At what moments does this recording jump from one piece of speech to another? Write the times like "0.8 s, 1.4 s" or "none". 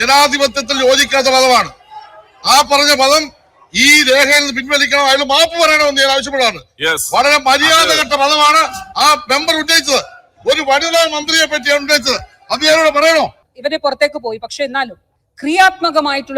13.5 s